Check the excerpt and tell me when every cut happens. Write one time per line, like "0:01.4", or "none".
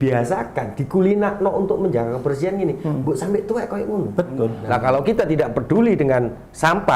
0:04.6